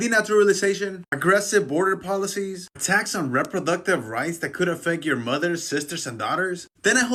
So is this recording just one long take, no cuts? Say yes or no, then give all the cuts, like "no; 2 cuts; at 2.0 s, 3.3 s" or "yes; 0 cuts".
yes; 0 cuts